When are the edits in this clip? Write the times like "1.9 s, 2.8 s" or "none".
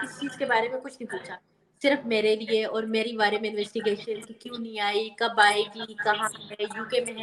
none